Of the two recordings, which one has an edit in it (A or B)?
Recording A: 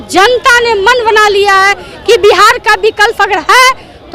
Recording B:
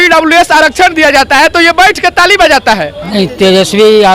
B